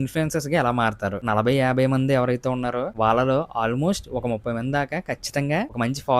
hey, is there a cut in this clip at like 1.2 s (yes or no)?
yes